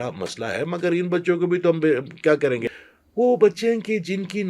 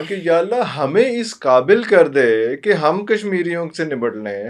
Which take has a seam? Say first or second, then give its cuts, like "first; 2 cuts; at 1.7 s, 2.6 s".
first; 1 cut; at 2.6 s